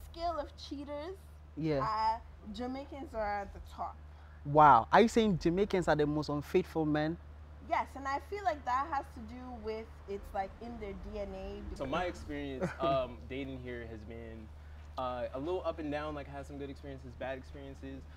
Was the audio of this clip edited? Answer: yes; 1 cut; at 11.8 s

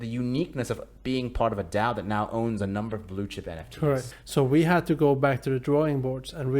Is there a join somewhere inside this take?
yes; 1 cut; at 4.1 s

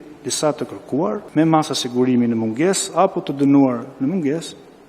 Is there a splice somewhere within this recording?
yes; 1 cut; at 1.2 s

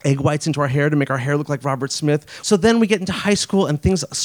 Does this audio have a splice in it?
yes; 1 cut; at 2.3 s

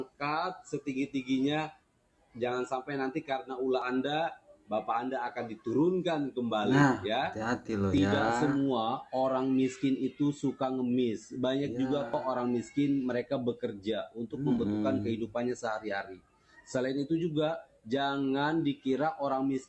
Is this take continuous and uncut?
yes; 0 cuts

